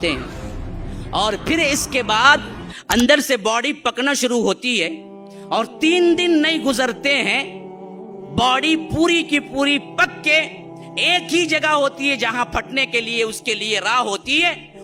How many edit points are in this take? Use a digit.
0